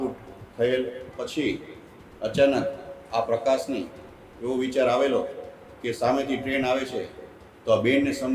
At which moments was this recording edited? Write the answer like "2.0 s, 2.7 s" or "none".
1.0 s